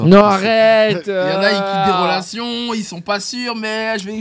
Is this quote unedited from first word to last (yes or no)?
yes